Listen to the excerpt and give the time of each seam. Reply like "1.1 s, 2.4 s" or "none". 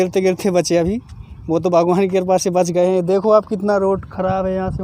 none